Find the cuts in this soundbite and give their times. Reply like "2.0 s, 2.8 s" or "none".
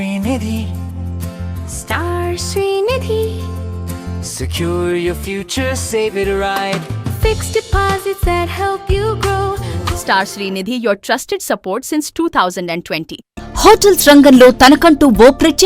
9.7 s, 13.2 s